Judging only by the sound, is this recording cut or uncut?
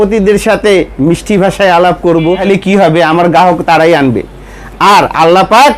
cut